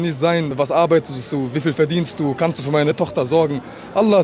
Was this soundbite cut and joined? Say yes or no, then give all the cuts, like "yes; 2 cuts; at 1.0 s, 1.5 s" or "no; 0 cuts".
no; 0 cuts